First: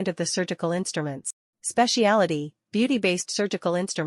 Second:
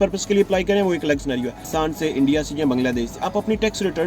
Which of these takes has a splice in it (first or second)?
second